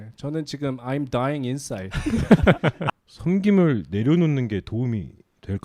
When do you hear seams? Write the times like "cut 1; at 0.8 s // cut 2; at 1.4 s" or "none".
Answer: cut 1; at 2.9 s